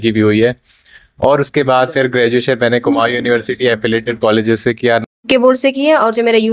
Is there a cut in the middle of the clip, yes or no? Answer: yes